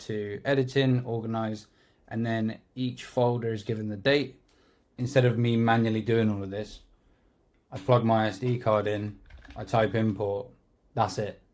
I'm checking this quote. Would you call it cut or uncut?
cut